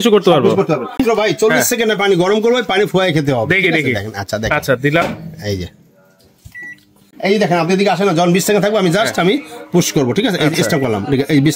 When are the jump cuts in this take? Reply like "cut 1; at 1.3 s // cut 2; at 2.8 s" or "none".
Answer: cut 1; at 1.0 s // cut 2; at 7.1 s